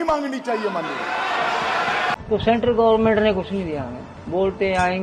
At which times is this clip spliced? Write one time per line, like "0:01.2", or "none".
0:02.1